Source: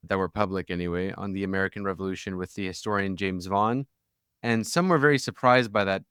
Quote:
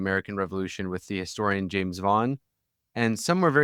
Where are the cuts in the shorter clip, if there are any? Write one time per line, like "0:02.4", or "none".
none